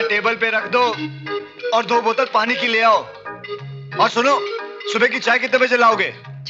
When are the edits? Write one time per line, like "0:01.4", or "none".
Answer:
none